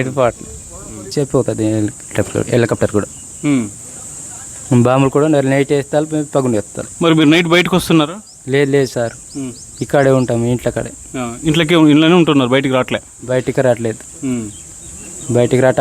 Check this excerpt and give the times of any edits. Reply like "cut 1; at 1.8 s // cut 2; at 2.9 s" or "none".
cut 1; at 1.1 s